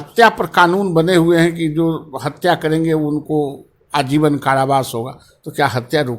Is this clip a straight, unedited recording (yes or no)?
yes